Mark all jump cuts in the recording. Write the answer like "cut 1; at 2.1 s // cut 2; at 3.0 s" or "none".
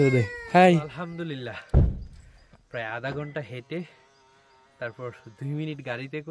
cut 1; at 1.1 s